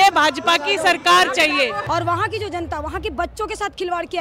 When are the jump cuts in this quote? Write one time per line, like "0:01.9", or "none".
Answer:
0:01.8

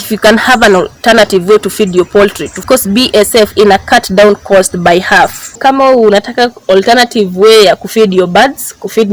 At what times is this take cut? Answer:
0:02.6
0:05.5

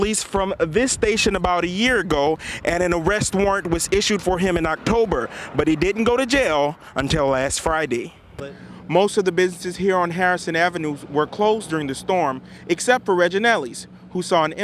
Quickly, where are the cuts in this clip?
0:08.4

